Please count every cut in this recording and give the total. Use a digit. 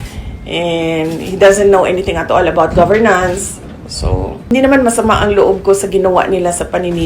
1